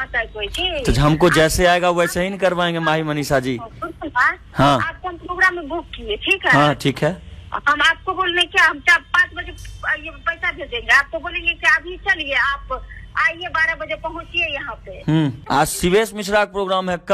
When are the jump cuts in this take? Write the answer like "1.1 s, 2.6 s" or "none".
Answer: 15.4 s